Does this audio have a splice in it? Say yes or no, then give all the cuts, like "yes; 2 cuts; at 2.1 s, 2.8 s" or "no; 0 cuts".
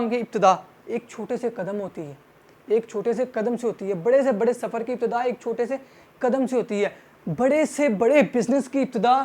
no; 0 cuts